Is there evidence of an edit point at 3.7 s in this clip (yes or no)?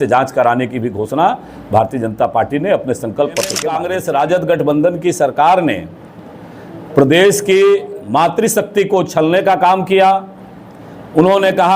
yes